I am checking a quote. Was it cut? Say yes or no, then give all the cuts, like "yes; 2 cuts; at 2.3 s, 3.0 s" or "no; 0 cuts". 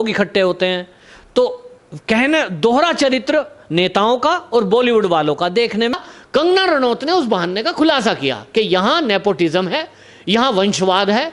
yes; 1 cut; at 6.0 s